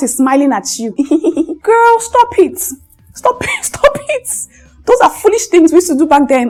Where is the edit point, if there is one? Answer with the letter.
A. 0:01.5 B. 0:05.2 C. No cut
C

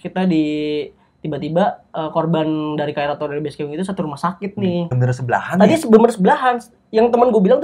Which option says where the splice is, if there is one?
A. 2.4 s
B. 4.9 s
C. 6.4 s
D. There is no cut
B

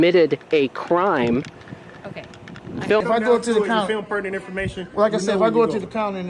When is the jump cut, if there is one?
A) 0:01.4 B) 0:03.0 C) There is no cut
B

